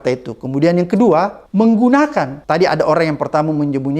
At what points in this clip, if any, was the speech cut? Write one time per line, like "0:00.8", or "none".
0:01.4
0:02.4